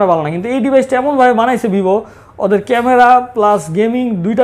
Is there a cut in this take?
no; 0 cuts

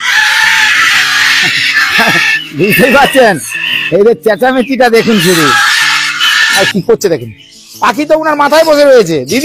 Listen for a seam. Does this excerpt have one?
yes; 1 cut; at 6.6 s

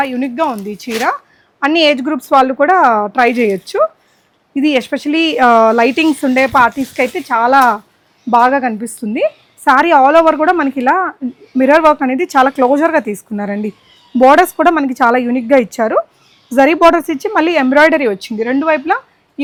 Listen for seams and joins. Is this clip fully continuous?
yes; 0 cuts

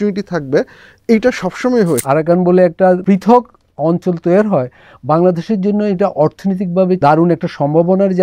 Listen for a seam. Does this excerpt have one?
yes; 3 cuts; at 2.0 s, 3.0 s, 7.0 s

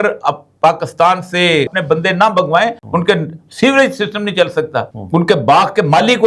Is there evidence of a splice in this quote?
yes; 2 cuts; at 1.8 s, 2.8 s

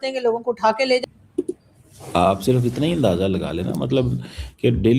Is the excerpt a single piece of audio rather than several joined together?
no; 1 cut; at 1.0 s

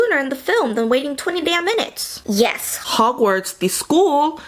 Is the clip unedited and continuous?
no; 1 cut; at 2.1 s

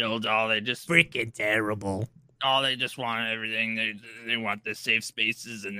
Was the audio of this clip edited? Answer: no; 0 cuts

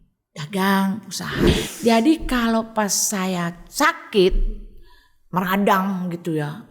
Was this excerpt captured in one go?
no; 1 cut; at 1.5 s

